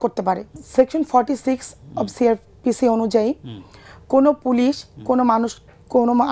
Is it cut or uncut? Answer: uncut